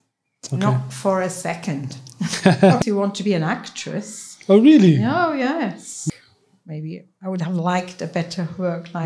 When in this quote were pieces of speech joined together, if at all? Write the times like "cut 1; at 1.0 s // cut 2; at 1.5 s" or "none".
cut 1; at 2.8 s // cut 2; at 6.0 s